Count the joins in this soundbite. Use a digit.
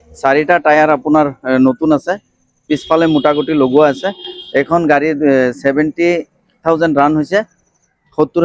0